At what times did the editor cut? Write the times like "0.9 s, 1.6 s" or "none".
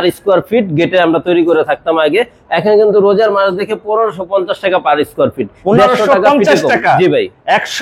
none